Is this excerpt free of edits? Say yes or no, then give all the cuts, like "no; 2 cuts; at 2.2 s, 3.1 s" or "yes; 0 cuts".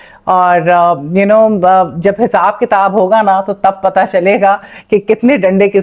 yes; 0 cuts